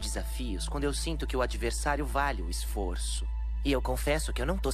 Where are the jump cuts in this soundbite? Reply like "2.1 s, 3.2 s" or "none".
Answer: none